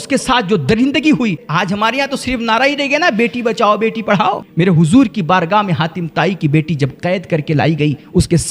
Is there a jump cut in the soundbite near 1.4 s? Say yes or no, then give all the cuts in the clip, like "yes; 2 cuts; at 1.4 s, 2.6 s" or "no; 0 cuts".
yes; 2 cuts; at 1.4 s, 4.5 s